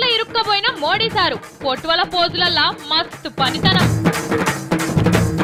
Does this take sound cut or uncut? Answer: uncut